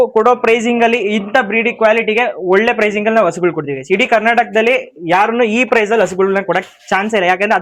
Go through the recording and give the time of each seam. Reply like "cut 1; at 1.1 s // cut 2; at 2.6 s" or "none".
none